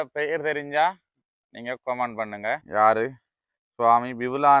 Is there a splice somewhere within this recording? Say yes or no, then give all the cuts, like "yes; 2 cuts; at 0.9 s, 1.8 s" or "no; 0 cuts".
yes; 1 cut; at 2.6 s